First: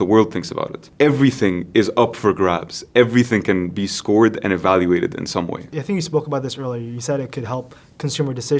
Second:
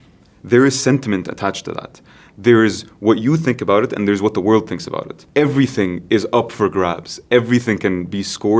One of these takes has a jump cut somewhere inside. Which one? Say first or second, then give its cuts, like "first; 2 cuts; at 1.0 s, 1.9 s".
first; 1 cut; at 5.7 s